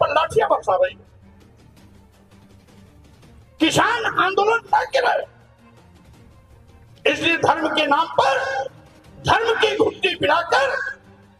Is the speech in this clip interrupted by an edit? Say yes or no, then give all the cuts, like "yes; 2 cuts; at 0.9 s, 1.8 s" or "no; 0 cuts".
yes; 2 cuts; at 1.1 s, 3.6 s